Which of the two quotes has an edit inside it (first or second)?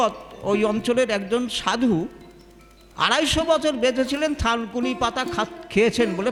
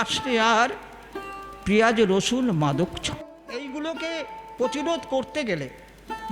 second